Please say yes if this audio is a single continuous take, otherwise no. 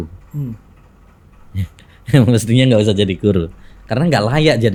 yes